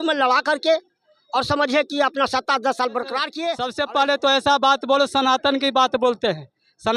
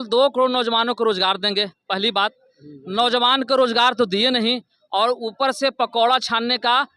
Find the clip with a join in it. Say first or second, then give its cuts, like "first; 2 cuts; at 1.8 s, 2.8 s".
first; 1 cut; at 3.6 s